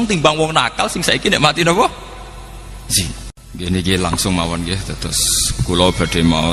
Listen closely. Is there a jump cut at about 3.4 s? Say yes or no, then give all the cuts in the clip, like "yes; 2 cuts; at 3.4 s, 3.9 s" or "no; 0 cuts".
yes; 1 cut; at 3.4 s